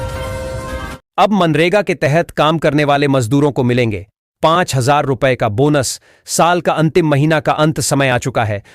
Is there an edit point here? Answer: yes; 1 cut; at 1.0 s

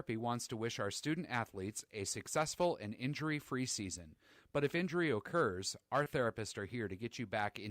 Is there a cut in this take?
yes; 1 cut; at 6.1 s

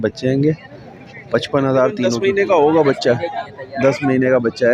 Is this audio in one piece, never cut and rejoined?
no; 1 cut; at 2.1 s

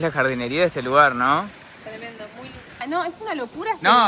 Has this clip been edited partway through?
yes; 1 cut; at 2.8 s

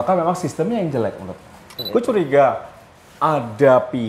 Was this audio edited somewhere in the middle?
yes; 1 cut; at 1.8 s

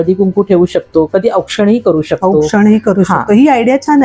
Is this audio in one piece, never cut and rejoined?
yes; 0 cuts

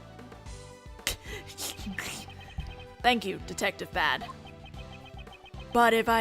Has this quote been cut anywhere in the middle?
yes; 1 cut; at 1.0 s

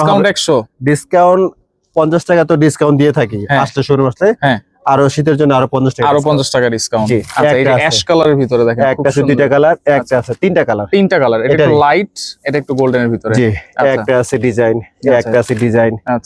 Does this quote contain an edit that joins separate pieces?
no; 0 cuts

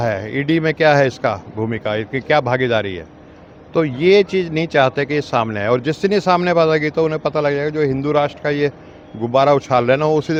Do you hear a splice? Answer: no; 0 cuts

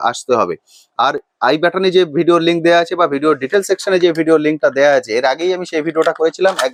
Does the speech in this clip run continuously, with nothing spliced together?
yes; 0 cuts

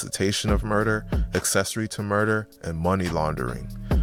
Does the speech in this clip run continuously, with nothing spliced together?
yes; 0 cuts

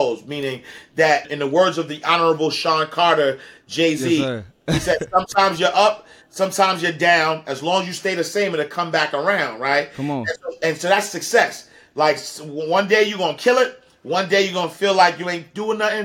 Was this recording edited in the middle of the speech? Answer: yes; 1 cut; at 1.2 s

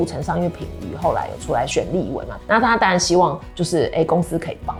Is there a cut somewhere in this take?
no; 0 cuts

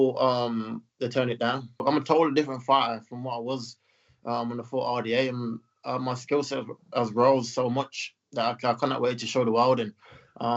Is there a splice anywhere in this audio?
yes; 1 cut; at 1.8 s

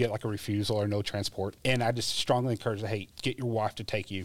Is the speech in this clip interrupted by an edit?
yes; 2 cuts; at 1.6 s, 3.1 s

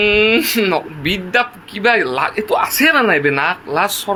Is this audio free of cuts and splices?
yes; 0 cuts

